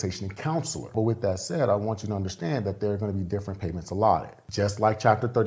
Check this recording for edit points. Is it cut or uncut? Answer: cut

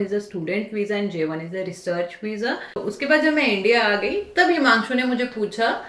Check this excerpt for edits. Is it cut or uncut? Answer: cut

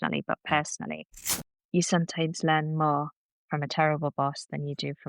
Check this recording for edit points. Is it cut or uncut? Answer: cut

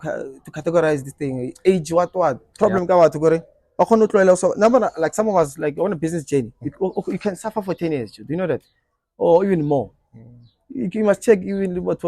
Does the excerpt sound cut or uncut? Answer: cut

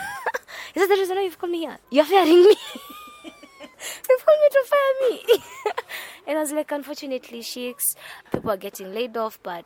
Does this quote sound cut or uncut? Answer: uncut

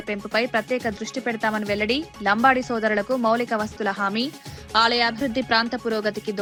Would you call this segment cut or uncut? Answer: uncut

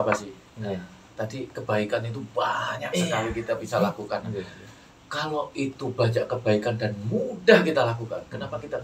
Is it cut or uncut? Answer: uncut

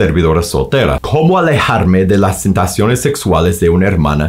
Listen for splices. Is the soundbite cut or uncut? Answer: cut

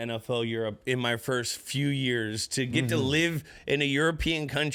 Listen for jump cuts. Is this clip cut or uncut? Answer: uncut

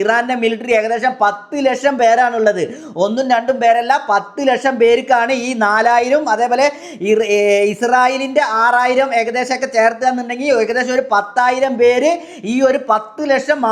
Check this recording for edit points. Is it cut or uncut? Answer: uncut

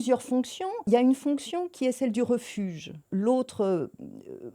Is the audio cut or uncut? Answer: cut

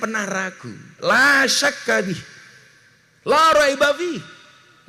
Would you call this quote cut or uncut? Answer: uncut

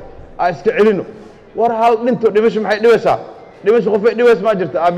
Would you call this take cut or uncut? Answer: uncut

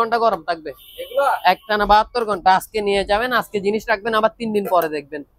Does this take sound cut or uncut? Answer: uncut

